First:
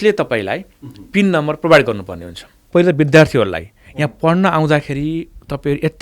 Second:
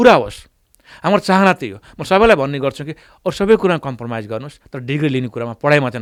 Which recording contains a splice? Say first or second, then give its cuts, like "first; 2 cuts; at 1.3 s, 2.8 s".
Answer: first; 1 cut; at 2.7 s